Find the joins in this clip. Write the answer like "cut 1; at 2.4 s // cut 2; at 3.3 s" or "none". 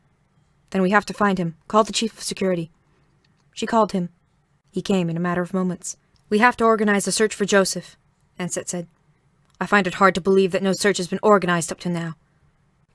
cut 1; at 5.9 s